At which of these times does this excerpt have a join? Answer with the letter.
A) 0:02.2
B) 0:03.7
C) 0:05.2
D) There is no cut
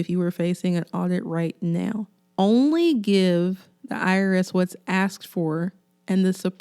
A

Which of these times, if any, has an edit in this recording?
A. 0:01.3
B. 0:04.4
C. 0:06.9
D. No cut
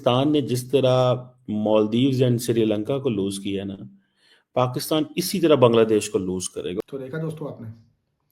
D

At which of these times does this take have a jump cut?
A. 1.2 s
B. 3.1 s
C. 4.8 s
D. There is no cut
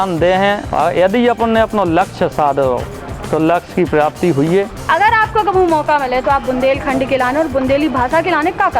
C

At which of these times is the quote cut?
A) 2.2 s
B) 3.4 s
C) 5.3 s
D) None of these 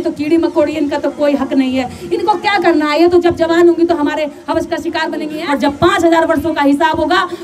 C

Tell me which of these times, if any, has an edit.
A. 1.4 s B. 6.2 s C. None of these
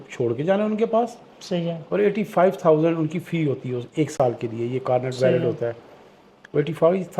C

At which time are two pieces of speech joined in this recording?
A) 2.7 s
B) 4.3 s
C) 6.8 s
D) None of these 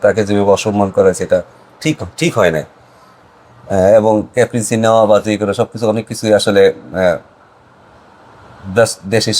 D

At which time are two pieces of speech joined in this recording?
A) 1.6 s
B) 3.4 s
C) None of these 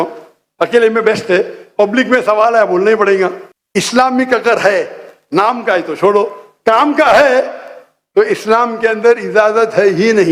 C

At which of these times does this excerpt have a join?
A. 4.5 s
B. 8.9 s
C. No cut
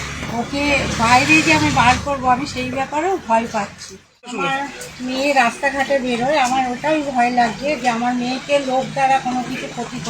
A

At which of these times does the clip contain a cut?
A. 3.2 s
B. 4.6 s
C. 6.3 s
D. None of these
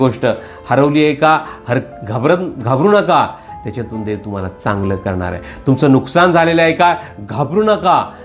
D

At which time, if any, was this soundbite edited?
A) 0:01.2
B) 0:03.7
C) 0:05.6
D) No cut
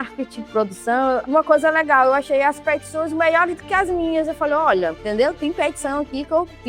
A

